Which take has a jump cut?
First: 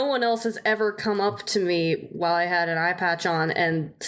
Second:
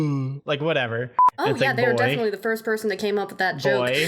second; 1 cut; at 1.2 s

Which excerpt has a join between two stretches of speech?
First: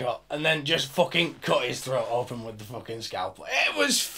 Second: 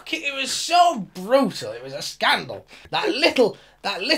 second; 1 cut; at 2.9 s

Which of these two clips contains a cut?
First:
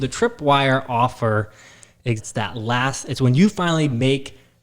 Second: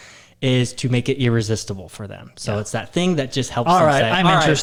first; 1 cut; at 2.2 s

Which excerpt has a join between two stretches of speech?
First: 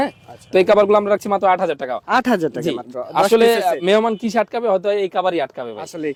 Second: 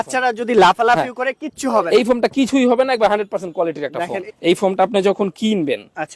second; 1 cut; at 4.2 s

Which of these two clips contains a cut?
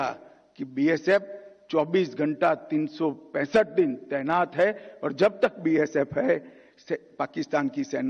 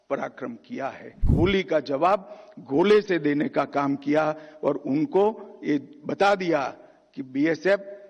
second; 1 cut; at 1.2 s

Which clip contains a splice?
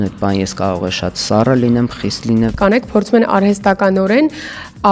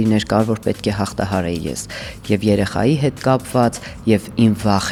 first; 1 cut; at 2.6 s

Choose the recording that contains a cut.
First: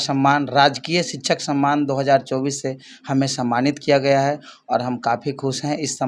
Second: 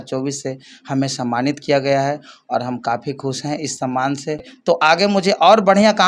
second; 1 cut; at 4.8 s

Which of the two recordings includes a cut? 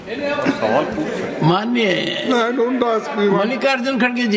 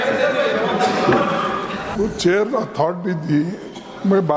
second; 1 cut; at 1.9 s

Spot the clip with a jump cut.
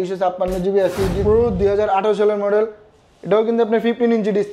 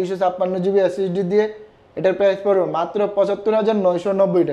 first; 1 cut; at 1.2 s

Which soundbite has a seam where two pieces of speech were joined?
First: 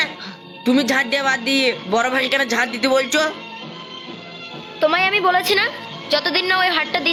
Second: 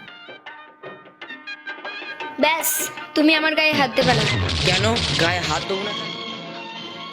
second; 2 cuts; at 1.3 s, 5.9 s

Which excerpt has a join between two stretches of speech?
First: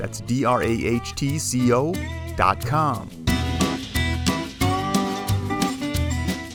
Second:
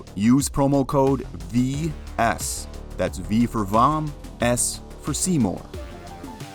second; 1 cut; at 5.7 s

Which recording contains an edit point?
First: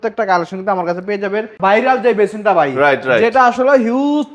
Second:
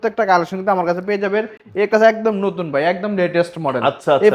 first; 1 cut; at 1.6 s

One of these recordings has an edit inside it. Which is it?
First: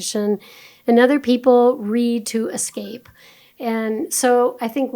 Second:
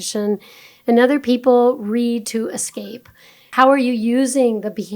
second; 1 cut; at 3.5 s

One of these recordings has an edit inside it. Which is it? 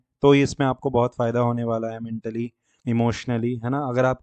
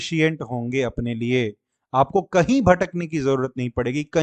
first; 1 cut; at 2.7 s

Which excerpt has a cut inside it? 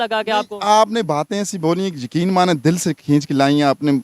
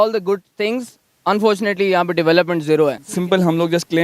second; 1 cut; at 3.1 s

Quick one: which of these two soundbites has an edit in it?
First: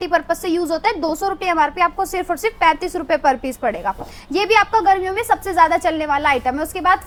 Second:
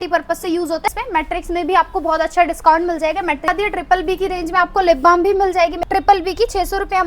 second; 3 cuts; at 0.9 s, 3.5 s, 5.7 s

